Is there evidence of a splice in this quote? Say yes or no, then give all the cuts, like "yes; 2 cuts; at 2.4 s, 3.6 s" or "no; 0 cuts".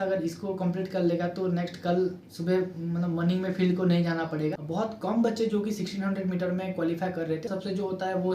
yes; 2 cuts; at 4.6 s, 7.5 s